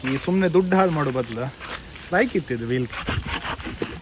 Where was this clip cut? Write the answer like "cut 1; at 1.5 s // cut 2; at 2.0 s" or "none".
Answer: cut 1; at 2.9 s